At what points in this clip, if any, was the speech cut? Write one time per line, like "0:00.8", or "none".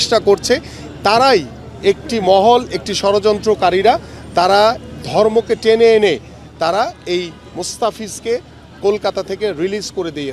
none